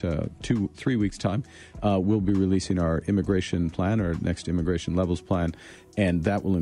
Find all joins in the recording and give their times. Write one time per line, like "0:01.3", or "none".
none